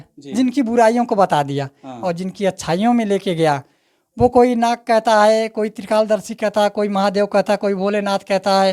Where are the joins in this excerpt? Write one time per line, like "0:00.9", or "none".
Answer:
none